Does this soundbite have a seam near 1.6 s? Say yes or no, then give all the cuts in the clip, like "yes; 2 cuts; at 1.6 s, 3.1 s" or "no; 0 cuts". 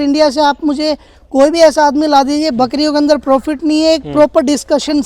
no; 0 cuts